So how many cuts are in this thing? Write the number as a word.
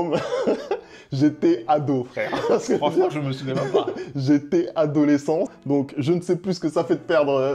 one